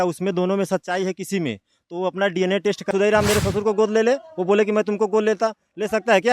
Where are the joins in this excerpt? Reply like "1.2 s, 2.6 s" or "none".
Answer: 2.9 s